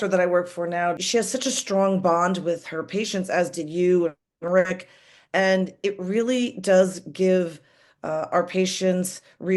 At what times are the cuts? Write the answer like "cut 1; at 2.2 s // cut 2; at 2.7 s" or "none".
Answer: cut 1; at 0.9 s